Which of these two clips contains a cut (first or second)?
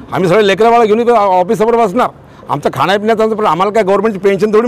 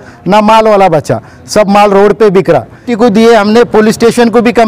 second